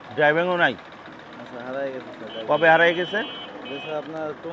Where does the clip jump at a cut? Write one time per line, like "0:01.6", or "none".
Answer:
none